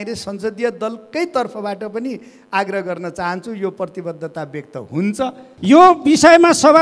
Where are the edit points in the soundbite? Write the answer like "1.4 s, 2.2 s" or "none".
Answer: 5.5 s